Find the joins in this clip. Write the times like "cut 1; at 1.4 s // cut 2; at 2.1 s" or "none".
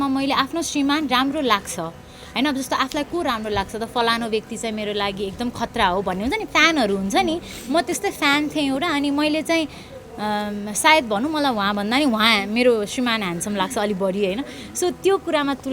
none